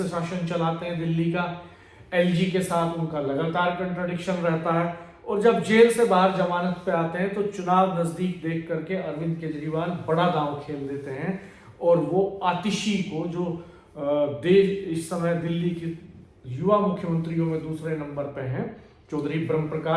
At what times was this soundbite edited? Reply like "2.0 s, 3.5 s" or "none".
none